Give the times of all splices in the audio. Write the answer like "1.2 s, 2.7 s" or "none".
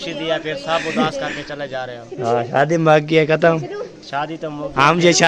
none